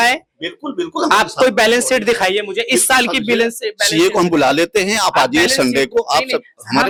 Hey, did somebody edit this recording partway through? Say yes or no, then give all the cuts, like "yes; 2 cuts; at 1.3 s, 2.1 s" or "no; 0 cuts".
no; 0 cuts